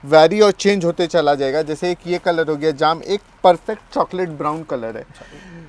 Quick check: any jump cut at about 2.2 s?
no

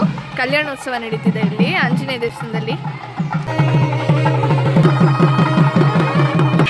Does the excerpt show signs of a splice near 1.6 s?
no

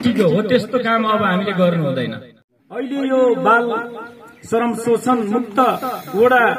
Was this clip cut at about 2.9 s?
yes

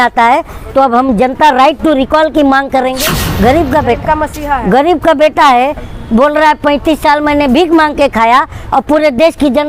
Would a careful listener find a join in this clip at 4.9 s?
no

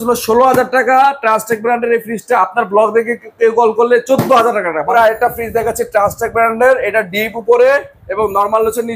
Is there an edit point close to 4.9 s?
yes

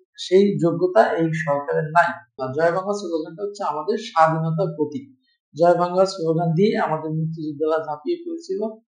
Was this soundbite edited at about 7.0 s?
no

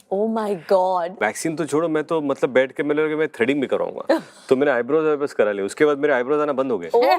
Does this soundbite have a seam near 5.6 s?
no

